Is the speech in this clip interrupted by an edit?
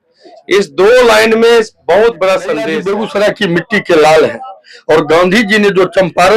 yes; 1 cut; at 2.8 s

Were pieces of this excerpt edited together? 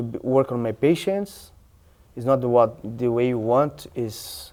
no; 0 cuts

